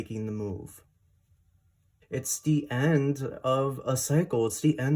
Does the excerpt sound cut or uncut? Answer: cut